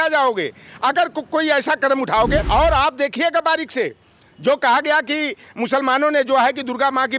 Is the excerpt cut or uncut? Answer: cut